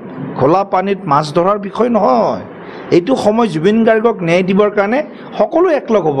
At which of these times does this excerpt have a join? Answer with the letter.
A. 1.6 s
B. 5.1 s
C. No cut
C